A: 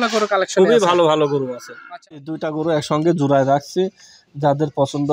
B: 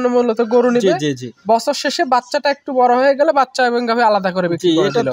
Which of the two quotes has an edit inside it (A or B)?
A